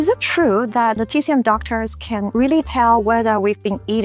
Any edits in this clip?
yes; 1 cut; at 1.0 s

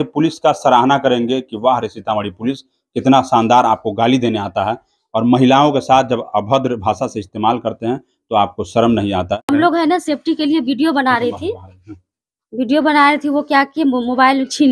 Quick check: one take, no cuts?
no; 1 cut; at 9.4 s

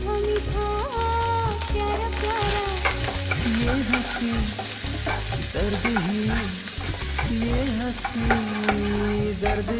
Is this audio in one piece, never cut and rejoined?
yes; 0 cuts

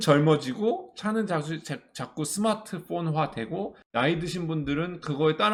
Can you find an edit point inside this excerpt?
no; 0 cuts

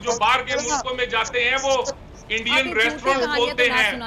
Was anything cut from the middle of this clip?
no; 0 cuts

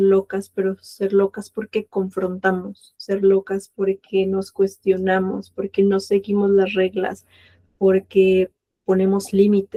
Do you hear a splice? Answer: no; 0 cuts

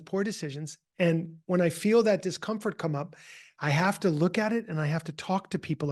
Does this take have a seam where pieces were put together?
no; 0 cuts

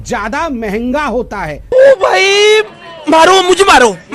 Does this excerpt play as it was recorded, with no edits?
no; 1 cut; at 1.6 s

